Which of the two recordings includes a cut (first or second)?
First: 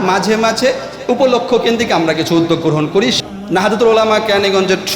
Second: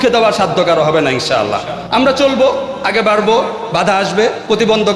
first